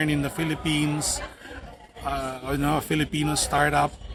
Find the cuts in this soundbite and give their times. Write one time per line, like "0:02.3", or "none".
none